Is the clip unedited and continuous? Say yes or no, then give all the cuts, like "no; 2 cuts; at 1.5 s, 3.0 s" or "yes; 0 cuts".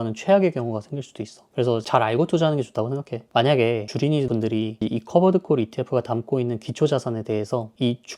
yes; 0 cuts